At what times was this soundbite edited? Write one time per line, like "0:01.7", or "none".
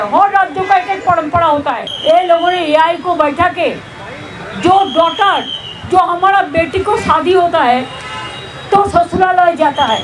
0:01.9